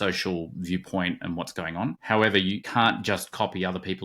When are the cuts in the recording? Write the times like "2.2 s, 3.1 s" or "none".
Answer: 2.0 s, 2.6 s

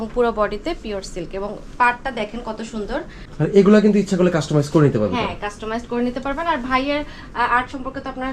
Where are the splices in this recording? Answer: 3.2 s

